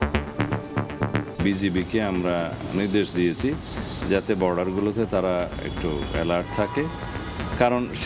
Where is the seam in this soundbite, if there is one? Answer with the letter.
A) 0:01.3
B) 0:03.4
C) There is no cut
A